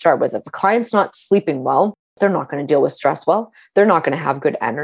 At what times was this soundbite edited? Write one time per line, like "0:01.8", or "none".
0:02.0